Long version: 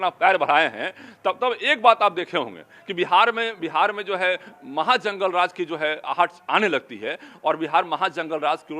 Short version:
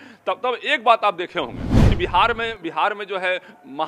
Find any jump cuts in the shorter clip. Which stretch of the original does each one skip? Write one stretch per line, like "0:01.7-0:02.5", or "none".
none

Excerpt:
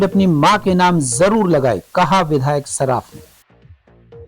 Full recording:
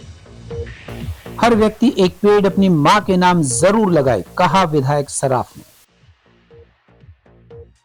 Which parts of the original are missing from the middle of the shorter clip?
0:05.8-0:06.7

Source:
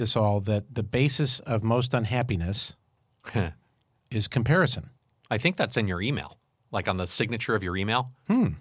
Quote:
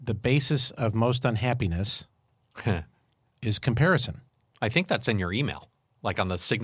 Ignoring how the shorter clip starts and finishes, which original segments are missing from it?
none

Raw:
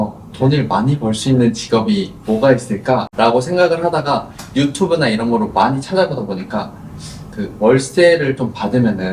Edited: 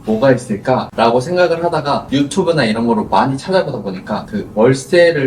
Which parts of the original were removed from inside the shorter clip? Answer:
0:04.2-0:04.5
0:06.8-0:07.4

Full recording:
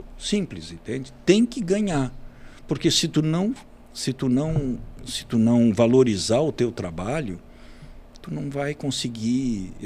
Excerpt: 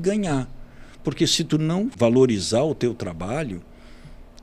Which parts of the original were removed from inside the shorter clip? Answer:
0:03.6-0:05.7

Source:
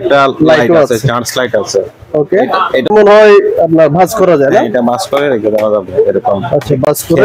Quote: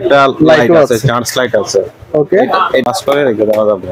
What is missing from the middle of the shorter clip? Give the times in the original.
0:02.9-0:04.9

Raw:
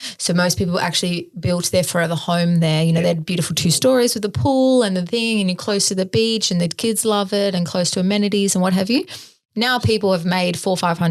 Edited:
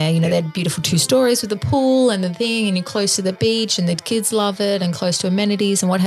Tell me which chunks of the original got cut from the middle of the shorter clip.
none

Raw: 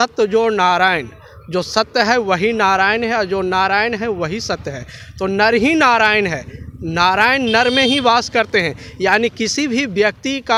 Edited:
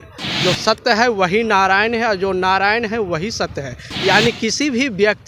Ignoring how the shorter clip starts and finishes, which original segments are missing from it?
0:04.9-0:08.8

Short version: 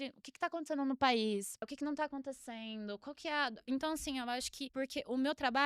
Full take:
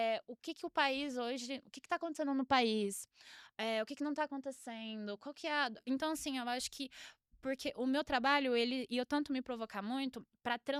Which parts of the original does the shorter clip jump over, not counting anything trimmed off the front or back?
0:03.2-0:03.9
0:06.8-0:07.3

